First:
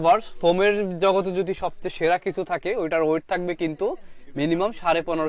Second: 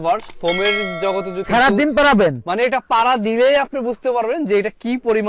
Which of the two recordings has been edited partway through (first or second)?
second